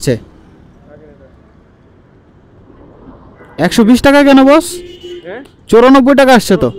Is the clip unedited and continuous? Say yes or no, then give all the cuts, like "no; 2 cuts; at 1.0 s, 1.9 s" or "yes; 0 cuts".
yes; 0 cuts